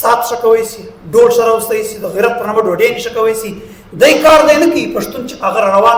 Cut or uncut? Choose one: uncut